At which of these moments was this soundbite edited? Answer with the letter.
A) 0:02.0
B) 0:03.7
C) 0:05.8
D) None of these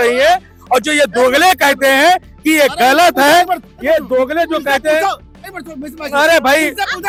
D